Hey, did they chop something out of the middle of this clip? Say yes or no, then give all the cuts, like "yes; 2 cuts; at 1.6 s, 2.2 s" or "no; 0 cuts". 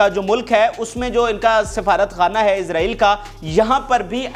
no; 0 cuts